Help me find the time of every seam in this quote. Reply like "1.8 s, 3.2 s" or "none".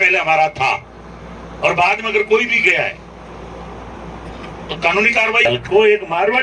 5.4 s